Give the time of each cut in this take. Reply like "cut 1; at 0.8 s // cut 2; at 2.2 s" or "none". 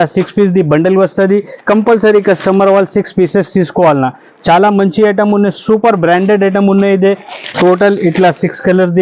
none